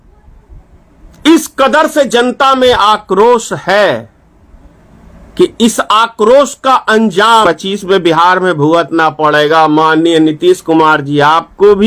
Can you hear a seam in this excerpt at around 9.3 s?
no; 1 cut; at 7.4 s

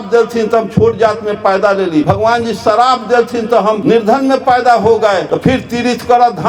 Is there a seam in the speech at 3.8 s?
yes; 3 cuts; at 2.0 s, 3.8 s, 5.3 s

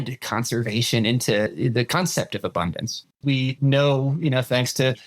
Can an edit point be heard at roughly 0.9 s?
no; 1 cut; at 3.4 s

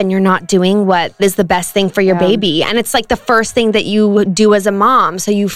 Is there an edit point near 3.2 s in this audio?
no; 1 cut; at 1.2 s

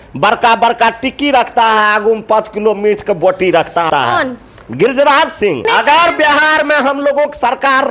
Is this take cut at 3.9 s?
yes; 2 cuts; at 3.9 s, 5.7 s

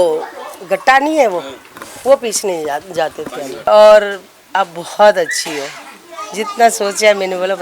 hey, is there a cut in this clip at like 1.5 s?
no; 1 cut; at 3.7 s

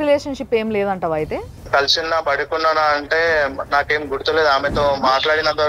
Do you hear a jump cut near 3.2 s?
no; 1 cut; at 1.6 s

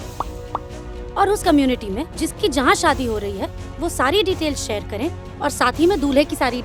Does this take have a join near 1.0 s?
no; 0 cuts

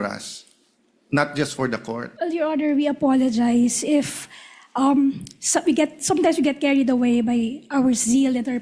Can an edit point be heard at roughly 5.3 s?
no; 1 cut; at 2.1 s

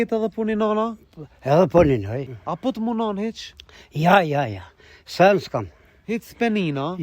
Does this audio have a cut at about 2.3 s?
yes; 1 cut; at 2.3 s

